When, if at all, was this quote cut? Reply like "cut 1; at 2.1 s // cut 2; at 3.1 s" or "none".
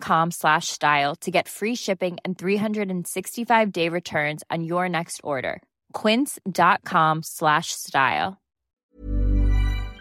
cut 1; at 8.8 s